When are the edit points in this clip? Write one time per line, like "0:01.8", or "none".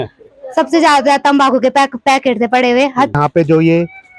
0:03.2